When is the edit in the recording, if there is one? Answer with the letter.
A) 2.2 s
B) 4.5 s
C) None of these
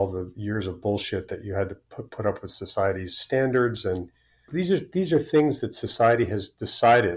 B